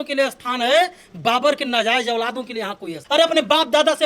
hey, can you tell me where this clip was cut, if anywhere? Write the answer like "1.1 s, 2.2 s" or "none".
2.9 s